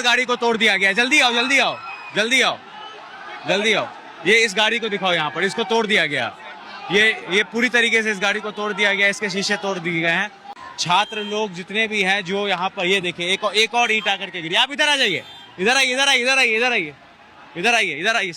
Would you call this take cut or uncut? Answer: cut